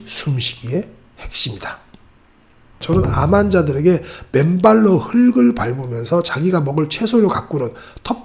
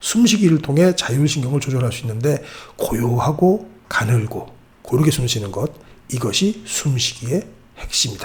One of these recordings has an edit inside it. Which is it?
first; 1 cut; at 2.8 s

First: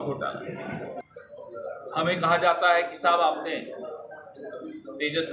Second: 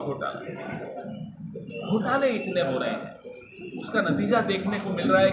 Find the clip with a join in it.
first; 1 cut; at 1.0 s

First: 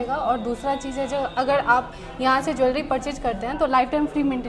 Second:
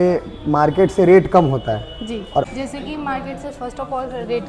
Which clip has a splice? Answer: second; 1 cut; at 2.5 s

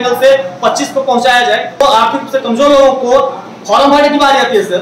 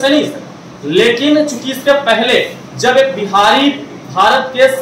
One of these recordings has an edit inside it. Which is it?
first; 1 cut; at 1.8 s

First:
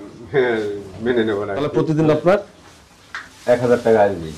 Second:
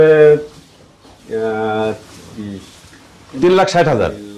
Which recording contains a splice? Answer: first; 1 cut; at 1.7 s

